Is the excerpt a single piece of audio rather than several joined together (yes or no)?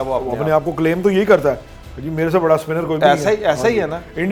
yes